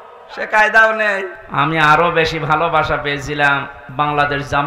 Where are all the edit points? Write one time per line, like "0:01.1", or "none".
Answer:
0:01.4
0:03.8